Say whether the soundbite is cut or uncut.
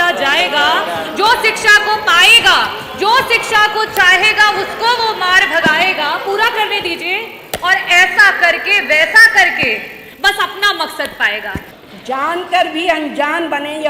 cut